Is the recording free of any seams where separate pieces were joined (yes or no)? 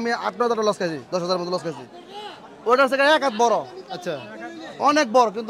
yes